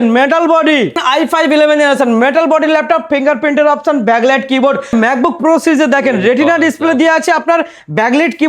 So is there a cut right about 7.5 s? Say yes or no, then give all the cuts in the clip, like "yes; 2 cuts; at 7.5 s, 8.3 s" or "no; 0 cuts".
no; 2 cuts; at 1.0 s, 4.9 s